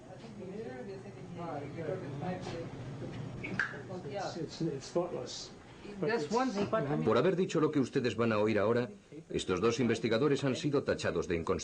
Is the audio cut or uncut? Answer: cut